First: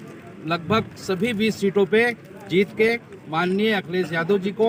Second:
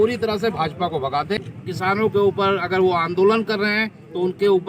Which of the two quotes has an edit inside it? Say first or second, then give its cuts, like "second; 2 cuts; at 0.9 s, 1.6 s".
second; 1 cut; at 1.4 s